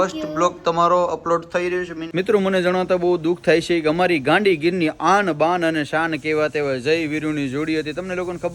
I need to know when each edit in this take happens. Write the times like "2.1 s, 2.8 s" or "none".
2.0 s